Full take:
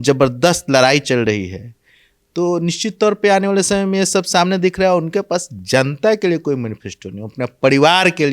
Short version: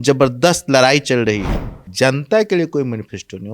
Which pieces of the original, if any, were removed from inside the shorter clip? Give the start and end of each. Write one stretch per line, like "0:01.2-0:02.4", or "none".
0:01.8-0:05.5

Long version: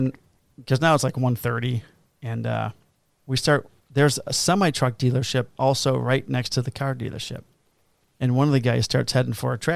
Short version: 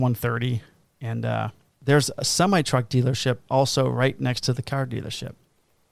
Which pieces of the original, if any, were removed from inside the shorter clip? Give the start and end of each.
0:02.9-0:03.8

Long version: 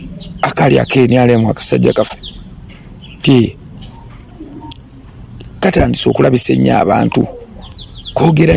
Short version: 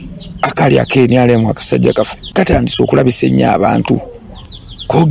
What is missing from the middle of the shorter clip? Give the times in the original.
0:02.2-0:05.5

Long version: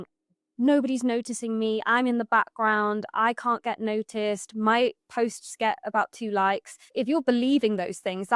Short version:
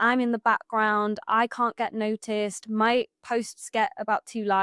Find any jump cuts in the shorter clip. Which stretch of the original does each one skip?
none

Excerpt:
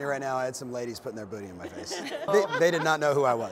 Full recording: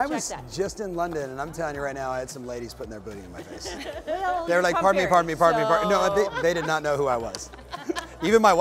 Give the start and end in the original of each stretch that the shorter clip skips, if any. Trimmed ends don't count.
0:04.0-0:06.1

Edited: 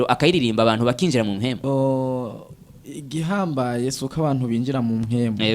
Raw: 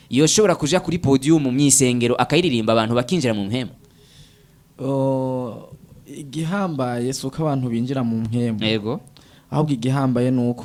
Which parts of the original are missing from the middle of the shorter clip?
0:03.7-0:04.8

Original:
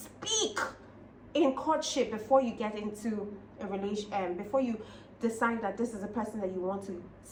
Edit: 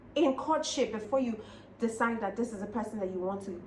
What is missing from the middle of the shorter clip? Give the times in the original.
0:02.2-0:04.4

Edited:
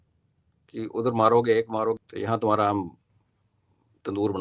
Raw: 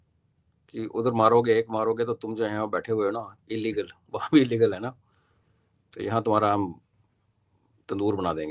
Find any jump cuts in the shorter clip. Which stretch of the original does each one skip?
0:02.0-0:05.8

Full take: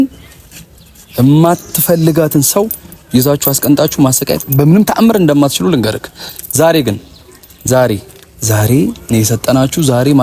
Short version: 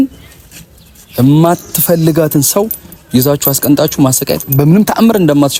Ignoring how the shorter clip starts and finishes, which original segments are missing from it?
none

